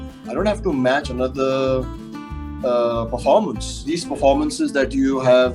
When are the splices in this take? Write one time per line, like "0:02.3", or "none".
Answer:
0:03.8